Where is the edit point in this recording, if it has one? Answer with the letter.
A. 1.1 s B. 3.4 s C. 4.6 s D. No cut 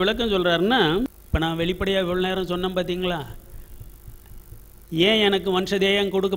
A